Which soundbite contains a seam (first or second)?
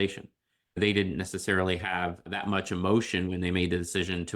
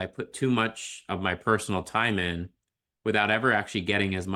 first